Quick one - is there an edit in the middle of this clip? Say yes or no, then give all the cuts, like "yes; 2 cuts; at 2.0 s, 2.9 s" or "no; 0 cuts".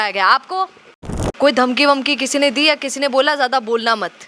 yes; 1 cut; at 1.0 s